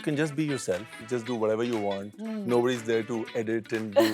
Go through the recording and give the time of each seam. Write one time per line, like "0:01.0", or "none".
0:00.9